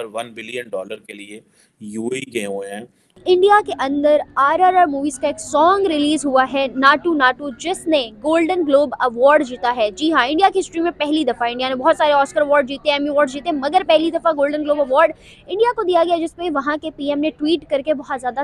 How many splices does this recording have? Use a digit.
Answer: 1